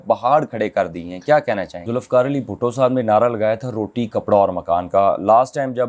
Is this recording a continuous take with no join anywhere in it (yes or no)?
no